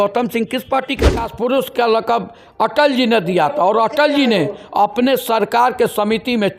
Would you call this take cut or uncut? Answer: cut